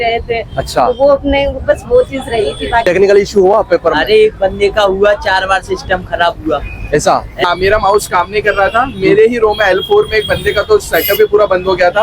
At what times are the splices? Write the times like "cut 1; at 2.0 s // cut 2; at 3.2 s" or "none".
cut 1; at 2.8 s // cut 2; at 7.4 s